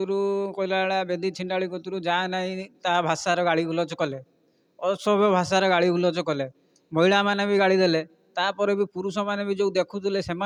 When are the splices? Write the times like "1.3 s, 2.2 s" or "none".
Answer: none